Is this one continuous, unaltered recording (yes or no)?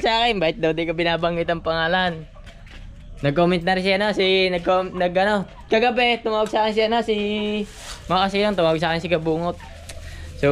yes